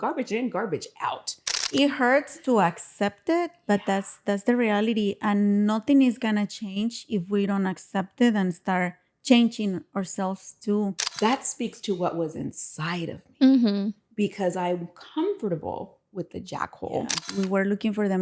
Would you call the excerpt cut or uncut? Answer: cut